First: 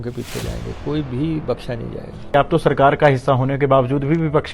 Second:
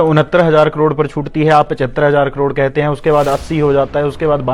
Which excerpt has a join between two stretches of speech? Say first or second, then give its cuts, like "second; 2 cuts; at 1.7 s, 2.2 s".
first; 1 cut; at 2.3 s